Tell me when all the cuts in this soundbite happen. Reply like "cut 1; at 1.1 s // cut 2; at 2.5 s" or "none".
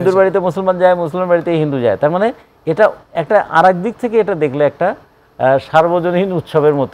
none